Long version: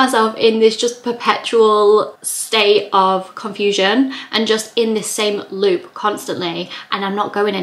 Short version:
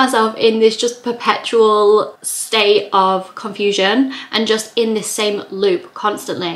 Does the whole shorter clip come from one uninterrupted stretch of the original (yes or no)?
yes